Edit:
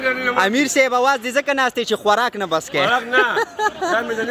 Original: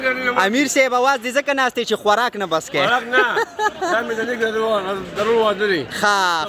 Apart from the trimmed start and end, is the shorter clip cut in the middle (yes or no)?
no